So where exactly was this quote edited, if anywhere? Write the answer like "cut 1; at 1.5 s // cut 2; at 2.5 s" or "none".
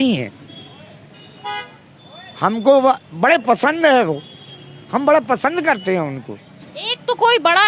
none